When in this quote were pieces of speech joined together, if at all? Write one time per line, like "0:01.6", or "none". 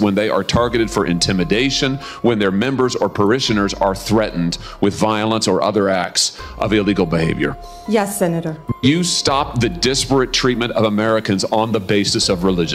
0:08.7